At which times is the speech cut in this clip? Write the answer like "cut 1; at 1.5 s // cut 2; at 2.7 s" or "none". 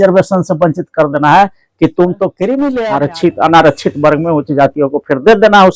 cut 1; at 2.8 s

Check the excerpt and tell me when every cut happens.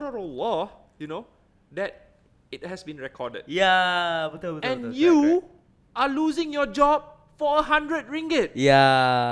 none

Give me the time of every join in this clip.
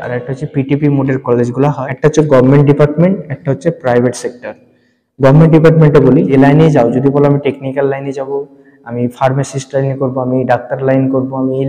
cut 1; at 1.8 s // cut 2; at 6.3 s

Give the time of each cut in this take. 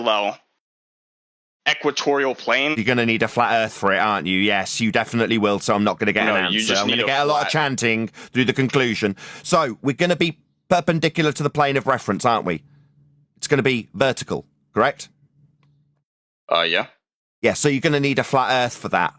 cut 1; at 2.8 s

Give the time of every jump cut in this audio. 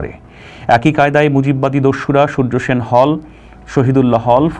none

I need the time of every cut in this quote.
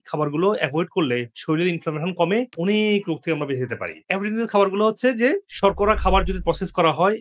none

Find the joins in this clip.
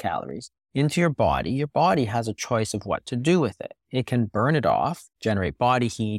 cut 1; at 5.1 s

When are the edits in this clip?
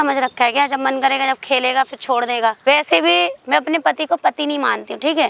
cut 1; at 2.6 s

